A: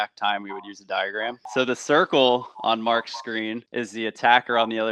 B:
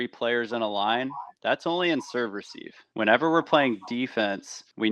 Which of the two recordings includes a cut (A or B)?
A